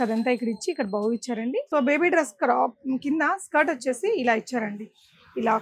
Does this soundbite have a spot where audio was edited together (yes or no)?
yes